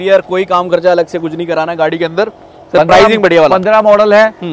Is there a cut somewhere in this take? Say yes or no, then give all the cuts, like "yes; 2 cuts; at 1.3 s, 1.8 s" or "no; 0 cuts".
no; 0 cuts